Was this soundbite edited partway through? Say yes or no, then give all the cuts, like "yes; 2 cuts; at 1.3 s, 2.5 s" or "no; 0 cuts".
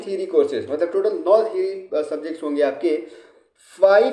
no; 0 cuts